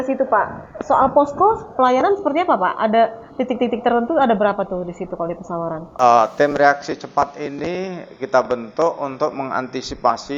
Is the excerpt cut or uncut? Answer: cut